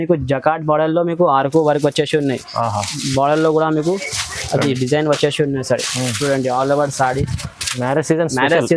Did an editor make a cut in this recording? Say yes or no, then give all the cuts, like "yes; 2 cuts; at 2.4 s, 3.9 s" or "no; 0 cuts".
no; 0 cuts